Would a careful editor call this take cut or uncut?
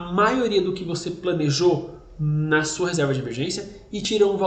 uncut